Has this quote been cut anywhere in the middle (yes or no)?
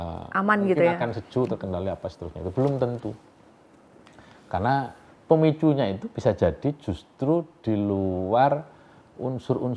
no